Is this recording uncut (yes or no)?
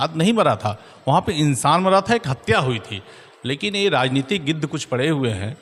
yes